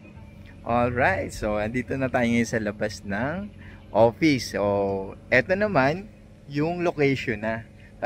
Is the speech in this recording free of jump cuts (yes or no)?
yes